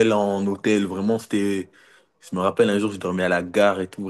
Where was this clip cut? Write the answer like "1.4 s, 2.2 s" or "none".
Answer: none